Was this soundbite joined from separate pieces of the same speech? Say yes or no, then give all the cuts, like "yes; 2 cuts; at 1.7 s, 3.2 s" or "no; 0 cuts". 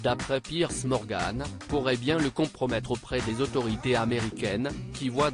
no; 0 cuts